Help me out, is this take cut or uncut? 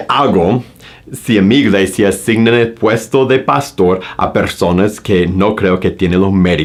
uncut